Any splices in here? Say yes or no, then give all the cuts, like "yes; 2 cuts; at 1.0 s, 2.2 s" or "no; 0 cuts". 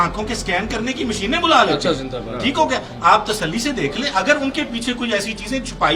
no; 0 cuts